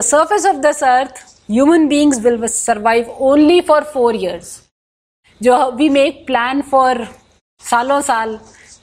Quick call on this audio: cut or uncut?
uncut